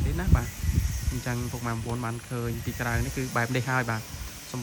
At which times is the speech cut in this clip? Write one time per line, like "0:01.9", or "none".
none